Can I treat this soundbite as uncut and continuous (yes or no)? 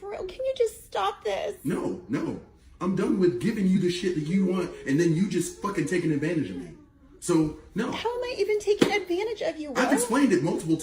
yes